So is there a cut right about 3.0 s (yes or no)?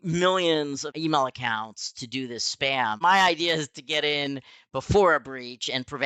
yes